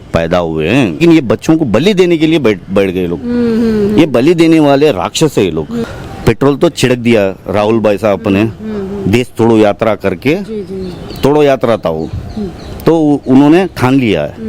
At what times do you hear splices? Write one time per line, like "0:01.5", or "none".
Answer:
0:01.0
0:05.8